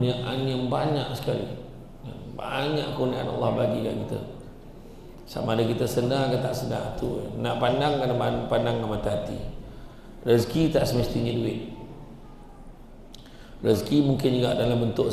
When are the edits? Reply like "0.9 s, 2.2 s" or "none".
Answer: none